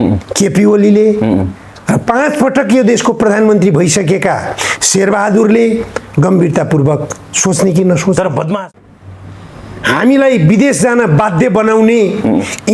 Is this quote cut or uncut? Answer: cut